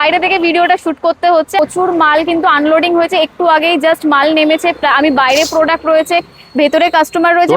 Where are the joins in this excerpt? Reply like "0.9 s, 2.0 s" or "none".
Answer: 1.5 s